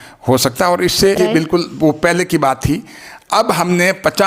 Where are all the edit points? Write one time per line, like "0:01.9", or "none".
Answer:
0:01.2